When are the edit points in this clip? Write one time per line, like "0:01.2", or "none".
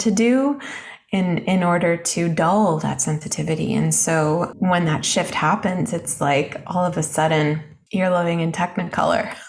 0:04.5
0:07.7